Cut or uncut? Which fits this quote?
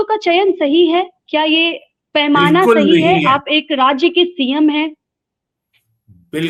uncut